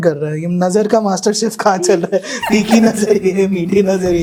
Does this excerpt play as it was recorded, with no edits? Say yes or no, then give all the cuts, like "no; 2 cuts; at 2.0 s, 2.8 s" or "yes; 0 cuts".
yes; 0 cuts